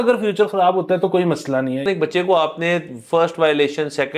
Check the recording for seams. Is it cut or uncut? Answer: cut